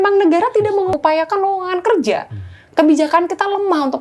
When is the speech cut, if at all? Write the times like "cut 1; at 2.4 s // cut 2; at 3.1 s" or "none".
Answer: cut 1; at 0.9 s